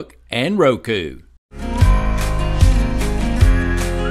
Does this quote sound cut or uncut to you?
cut